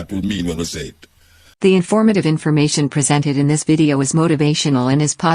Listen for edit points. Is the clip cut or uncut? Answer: cut